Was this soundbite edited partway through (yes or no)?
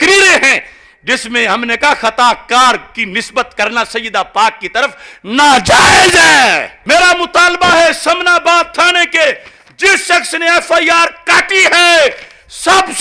yes